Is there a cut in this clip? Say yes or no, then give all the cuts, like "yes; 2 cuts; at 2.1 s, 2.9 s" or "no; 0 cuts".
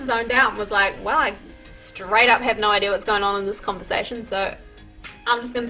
no; 0 cuts